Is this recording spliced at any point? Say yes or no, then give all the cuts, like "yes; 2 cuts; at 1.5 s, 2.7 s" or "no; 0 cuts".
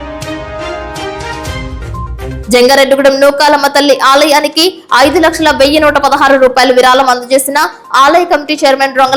no; 0 cuts